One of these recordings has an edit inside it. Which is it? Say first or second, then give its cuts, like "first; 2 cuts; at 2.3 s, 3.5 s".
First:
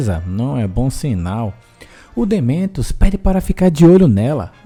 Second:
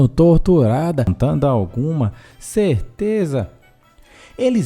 second; 1 cut; at 1.1 s